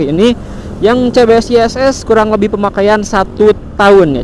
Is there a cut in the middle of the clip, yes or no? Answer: no